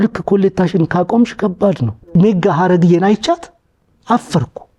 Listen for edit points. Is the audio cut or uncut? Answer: cut